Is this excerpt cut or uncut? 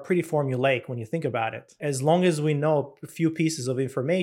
cut